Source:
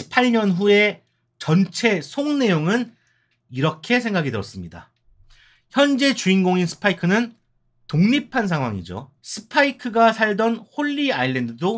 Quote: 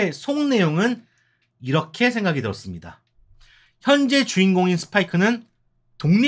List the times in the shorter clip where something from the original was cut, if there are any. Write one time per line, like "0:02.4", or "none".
none